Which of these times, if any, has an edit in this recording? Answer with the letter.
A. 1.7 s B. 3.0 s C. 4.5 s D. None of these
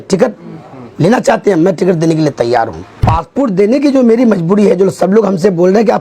B